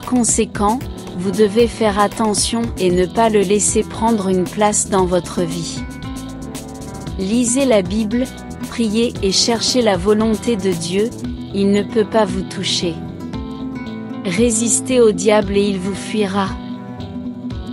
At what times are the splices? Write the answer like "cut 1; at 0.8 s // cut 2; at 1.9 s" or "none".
cut 1; at 5.7 s // cut 2; at 7.2 s